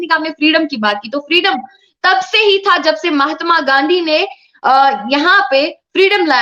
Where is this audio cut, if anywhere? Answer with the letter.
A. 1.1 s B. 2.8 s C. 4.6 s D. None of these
D